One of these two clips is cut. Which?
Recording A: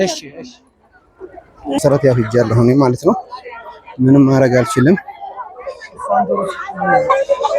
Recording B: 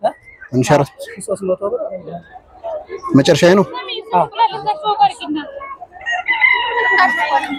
A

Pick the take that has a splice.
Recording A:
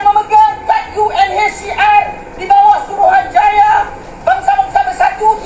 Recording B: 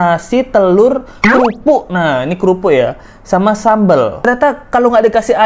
B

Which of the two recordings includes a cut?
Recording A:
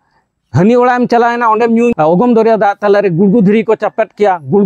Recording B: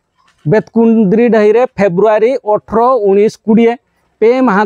A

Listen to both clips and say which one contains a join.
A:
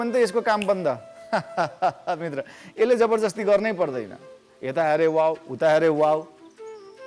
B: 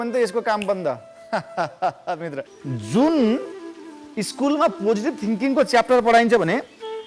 B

